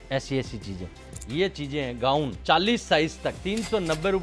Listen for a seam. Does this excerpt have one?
yes; 3 cuts; at 1.1 s, 2.4 s, 3.4 s

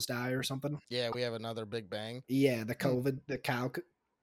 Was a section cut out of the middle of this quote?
yes; 2 cuts; at 0.8 s, 2.1 s

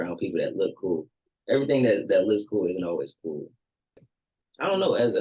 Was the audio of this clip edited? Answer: yes; 1 cut; at 4.1 s

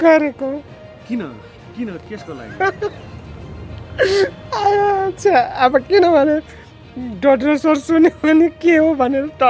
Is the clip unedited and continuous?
yes; 0 cuts

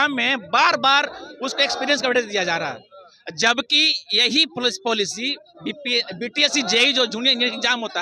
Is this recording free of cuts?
yes; 0 cuts

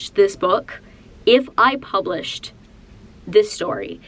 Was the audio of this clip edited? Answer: no; 0 cuts

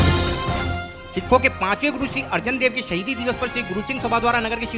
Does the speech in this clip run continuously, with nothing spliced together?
no; 1 cut; at 0.9 s

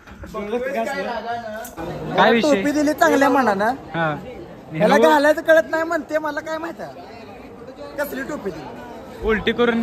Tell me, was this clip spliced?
yes; 1 cut; at 1.8 s

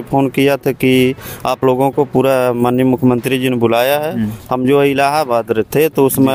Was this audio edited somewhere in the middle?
no; 0 cuts

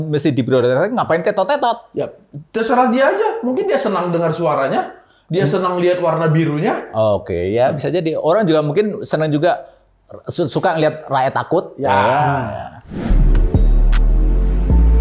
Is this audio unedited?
yes; 0 cuts

